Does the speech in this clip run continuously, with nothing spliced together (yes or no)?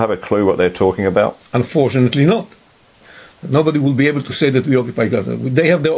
no